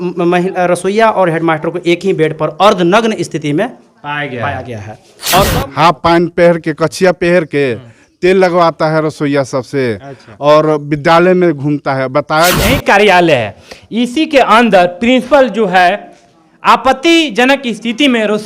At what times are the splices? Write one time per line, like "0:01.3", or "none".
0:05.5
0:12.6